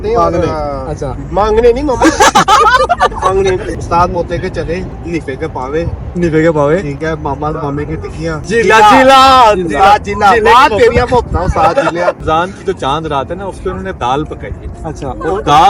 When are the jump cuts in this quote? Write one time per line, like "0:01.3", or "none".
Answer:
0:03.8
0:05.0
0:08.4
0:12.2